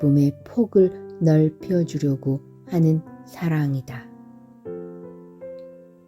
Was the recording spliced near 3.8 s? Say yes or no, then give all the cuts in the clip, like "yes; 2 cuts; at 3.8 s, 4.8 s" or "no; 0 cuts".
yes; 1 cut; at 3.8 s